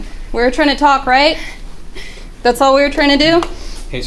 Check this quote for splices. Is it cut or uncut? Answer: uncut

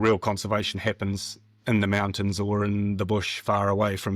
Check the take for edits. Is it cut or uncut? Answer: uncut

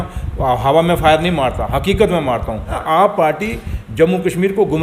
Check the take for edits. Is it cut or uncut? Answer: cut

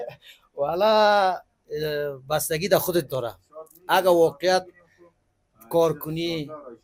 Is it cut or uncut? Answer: uncut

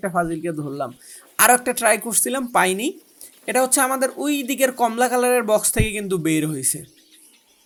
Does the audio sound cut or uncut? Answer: uncut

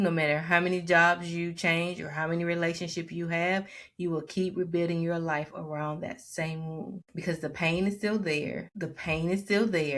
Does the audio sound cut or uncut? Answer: cut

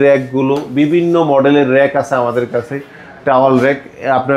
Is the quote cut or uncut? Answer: uncut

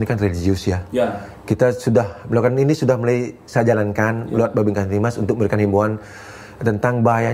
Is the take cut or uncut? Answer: uncut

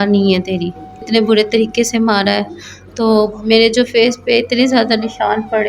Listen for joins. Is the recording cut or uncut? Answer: cut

